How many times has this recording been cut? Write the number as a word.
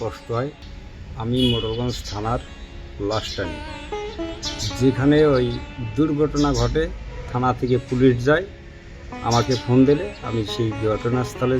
one